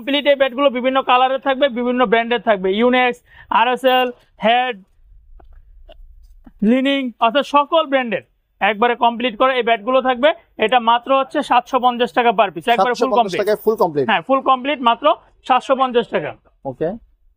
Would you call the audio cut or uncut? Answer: uncut